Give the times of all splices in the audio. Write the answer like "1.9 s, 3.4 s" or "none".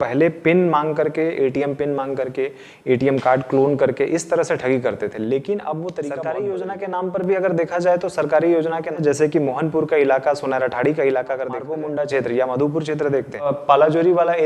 6.2 s, 8.9 s, 11.7 s, 13.5 s